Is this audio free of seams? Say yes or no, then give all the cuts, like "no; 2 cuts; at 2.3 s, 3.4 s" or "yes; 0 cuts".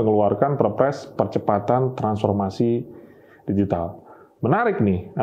yes; 0 cuts